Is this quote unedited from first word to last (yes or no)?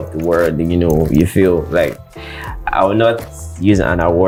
yes